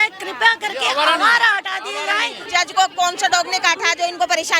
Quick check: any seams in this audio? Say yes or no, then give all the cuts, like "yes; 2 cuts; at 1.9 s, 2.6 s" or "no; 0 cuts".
yes; 1 cut; at 2.4 s